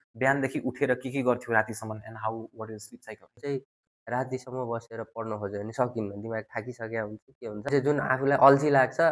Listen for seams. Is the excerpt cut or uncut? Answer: cut